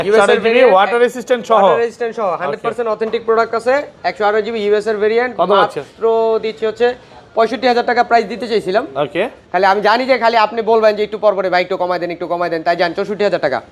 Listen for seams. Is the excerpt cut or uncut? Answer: uncut